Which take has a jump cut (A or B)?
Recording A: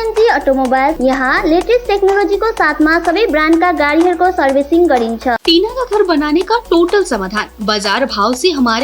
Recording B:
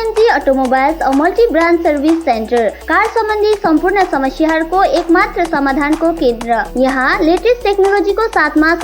A